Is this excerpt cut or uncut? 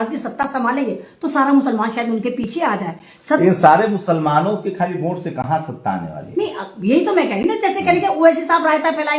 uncut